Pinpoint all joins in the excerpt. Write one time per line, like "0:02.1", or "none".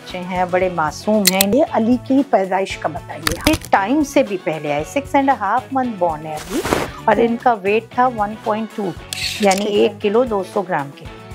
0:01.5
0:03.5